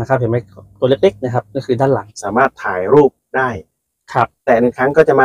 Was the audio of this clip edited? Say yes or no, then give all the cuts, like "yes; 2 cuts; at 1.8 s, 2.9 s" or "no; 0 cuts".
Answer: yes; 2 cuts; at 2.2 s, 4.4 s